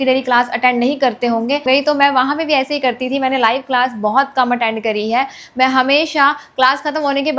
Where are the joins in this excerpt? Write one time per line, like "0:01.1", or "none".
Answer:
0:01.7

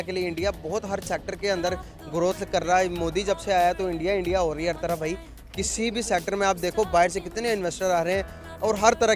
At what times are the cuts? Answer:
0:05.6

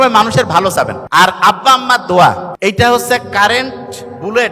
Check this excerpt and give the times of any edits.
0:01.0
0:02.5

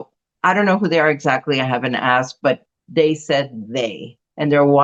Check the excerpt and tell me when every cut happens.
none

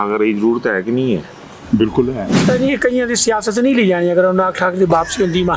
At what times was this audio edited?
0:02.4

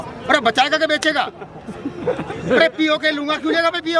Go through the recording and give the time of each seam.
none

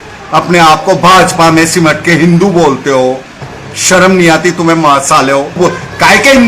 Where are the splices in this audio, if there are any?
0:05.6

